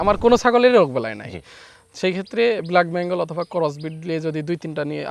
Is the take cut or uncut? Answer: uncut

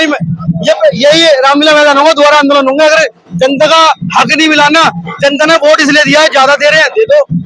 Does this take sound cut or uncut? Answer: uncut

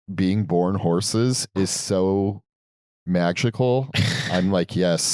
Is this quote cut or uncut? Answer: uncut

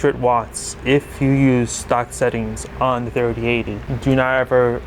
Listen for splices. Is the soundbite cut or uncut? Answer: cut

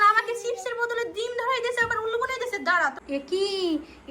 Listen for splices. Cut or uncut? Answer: cut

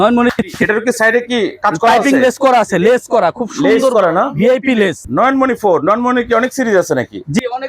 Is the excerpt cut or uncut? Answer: cut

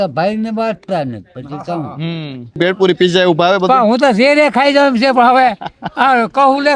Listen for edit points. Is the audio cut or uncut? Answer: cut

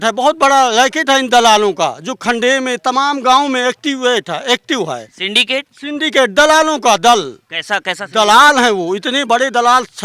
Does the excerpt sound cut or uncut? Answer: uncut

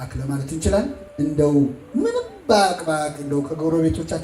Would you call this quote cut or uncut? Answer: cut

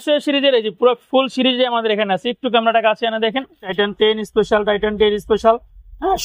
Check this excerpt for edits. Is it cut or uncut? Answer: cut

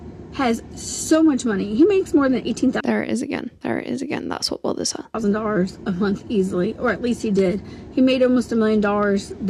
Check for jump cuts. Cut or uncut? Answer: uncut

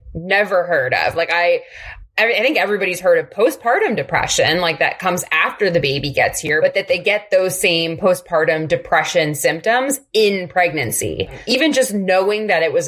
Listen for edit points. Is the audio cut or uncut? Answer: cut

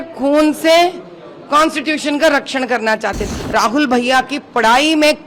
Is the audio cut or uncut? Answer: cut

